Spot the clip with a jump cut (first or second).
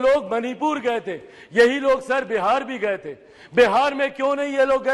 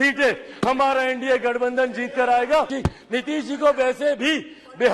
second